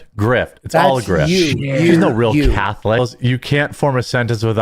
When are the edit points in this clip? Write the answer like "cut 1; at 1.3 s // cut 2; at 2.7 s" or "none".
cut 1; at 3.0 s